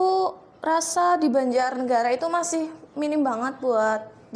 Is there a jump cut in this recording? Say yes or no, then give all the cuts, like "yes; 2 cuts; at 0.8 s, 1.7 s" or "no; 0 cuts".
no; 0 cuts